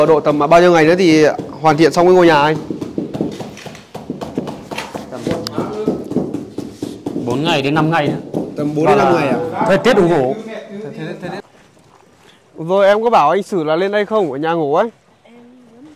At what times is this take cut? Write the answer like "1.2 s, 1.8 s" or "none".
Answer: 11.4 s